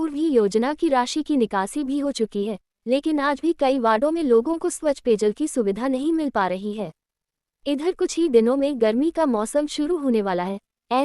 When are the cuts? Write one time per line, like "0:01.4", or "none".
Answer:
0:01.6